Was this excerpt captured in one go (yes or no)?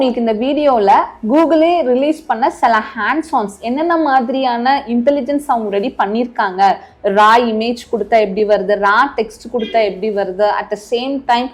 yes